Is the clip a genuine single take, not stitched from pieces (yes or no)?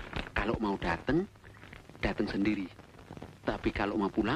yes